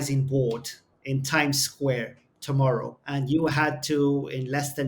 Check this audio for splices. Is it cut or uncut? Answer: cut